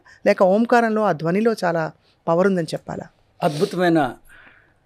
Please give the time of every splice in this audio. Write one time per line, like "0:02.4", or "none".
none